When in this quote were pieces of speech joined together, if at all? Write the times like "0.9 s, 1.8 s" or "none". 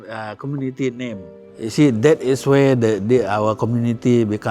1.4 s